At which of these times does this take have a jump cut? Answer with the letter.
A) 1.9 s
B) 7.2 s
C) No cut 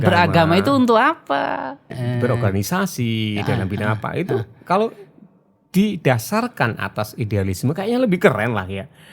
A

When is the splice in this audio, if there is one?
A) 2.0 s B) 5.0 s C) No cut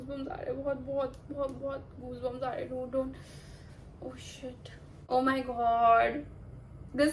B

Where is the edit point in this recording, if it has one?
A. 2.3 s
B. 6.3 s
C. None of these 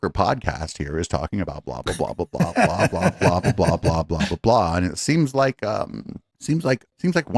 C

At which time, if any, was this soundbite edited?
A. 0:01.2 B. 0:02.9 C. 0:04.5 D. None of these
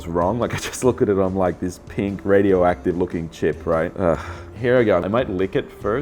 C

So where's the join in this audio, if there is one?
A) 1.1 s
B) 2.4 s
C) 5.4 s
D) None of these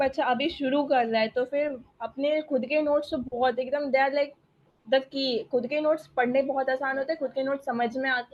D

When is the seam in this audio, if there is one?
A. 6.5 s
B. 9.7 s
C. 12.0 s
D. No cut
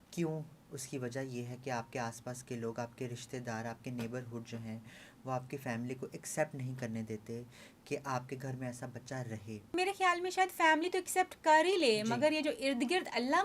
B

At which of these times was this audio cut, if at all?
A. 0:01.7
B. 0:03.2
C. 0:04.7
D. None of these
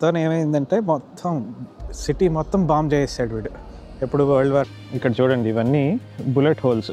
C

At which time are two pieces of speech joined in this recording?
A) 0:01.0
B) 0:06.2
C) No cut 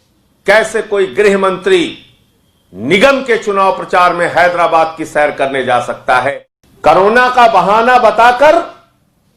B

